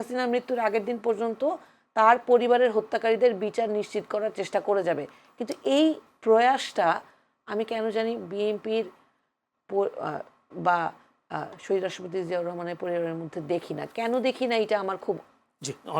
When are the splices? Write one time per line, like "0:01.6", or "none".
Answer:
none